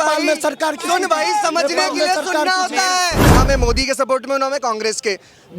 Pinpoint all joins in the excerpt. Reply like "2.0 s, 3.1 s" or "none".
3.2 s